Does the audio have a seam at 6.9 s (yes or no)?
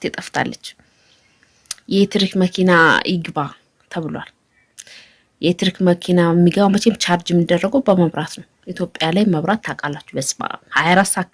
no